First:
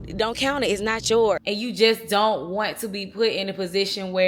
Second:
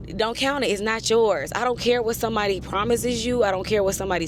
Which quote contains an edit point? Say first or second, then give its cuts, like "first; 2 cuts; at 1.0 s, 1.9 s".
first; 1 cut; at 1.4 s